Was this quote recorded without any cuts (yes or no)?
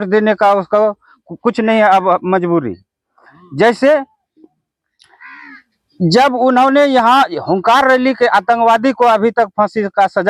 yes